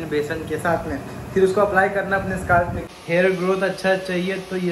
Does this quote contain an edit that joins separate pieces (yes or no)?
yes